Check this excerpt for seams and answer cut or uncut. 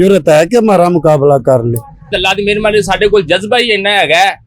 cut